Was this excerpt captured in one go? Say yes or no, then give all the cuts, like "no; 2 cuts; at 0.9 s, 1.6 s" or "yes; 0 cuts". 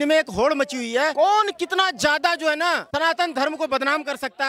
yes; 0 cuts